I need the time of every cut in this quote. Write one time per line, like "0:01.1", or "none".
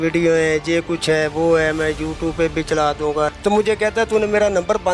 0:03.3